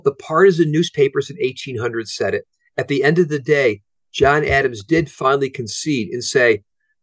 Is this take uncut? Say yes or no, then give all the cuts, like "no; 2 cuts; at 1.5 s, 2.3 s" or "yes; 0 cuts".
no; 1 cut; at 3.9 s